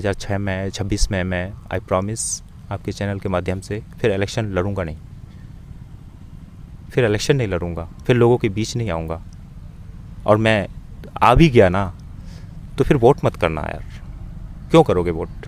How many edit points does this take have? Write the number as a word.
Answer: zero